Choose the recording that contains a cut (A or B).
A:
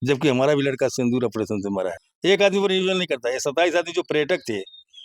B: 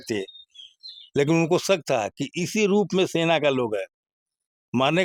A